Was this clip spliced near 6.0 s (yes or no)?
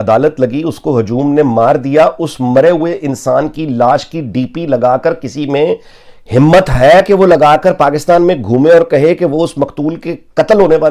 no